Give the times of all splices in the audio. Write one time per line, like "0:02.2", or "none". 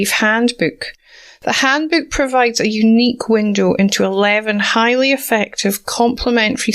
none